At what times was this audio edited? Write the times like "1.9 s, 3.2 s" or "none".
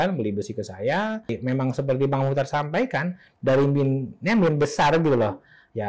1.3 s